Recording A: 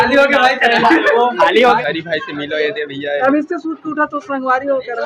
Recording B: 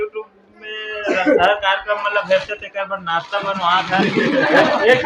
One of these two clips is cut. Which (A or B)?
A